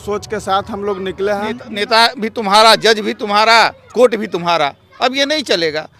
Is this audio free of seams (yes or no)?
no